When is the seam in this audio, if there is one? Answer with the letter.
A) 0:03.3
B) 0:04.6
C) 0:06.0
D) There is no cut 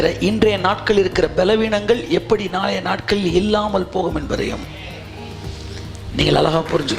D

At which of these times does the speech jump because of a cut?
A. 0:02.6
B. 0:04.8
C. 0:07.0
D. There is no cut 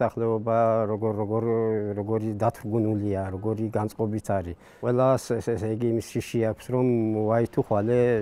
B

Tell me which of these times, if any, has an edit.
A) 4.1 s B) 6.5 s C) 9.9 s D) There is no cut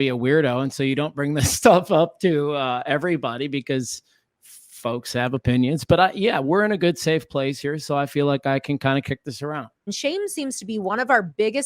C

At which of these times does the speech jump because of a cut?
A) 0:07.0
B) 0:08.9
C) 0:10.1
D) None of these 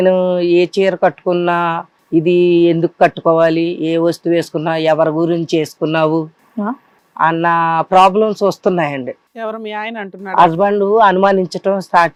D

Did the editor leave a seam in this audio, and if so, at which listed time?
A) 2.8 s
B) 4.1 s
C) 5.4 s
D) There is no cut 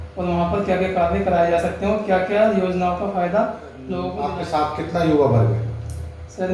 B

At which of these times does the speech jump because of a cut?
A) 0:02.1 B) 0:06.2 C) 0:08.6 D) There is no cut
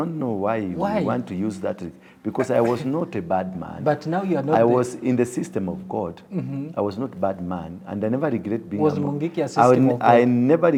D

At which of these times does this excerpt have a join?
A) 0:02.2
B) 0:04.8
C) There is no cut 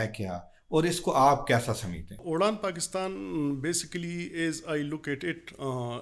A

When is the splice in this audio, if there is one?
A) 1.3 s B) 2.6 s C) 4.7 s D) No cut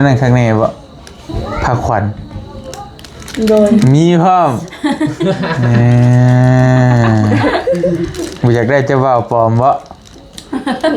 A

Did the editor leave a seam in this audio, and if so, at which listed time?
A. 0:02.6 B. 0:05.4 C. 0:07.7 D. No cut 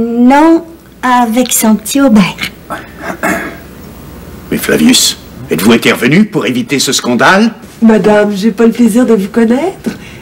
C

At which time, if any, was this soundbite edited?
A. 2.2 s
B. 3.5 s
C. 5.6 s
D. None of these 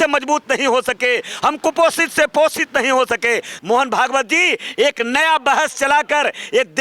B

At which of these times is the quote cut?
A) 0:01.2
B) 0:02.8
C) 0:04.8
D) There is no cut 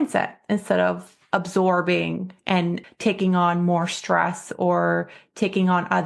B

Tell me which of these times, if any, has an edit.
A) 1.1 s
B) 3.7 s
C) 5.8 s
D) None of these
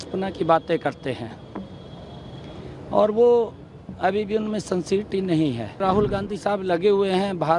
C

